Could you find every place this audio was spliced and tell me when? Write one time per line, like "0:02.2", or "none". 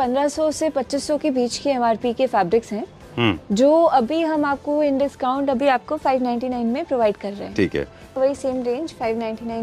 0:08.2